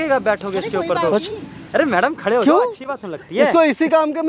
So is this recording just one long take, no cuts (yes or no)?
yes